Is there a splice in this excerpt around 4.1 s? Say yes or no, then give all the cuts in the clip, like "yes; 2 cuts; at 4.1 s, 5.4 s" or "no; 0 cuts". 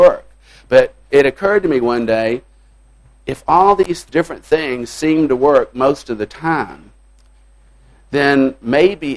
yes; 2 cuts; at 1.1 s, 4.1 s